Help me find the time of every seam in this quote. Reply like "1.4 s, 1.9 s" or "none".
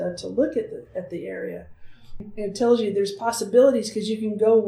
2.2 s